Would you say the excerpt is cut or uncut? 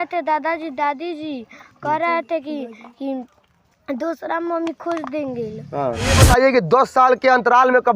cut